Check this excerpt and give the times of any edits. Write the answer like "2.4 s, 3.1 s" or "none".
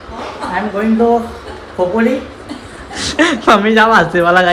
none